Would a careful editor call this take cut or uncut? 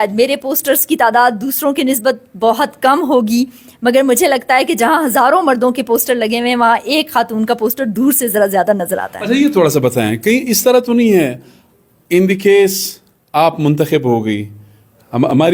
uncut